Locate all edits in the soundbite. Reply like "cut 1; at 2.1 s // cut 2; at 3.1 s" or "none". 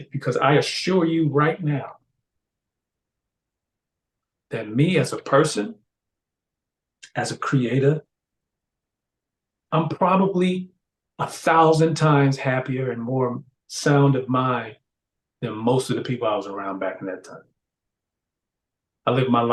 none